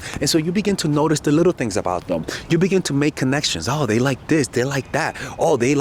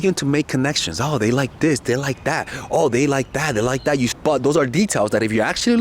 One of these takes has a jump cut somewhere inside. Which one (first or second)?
second